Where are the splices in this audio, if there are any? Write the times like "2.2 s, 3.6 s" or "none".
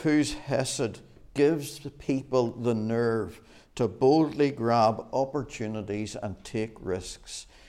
none